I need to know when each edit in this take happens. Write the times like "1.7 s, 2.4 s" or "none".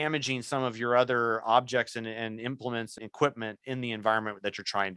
3.0 s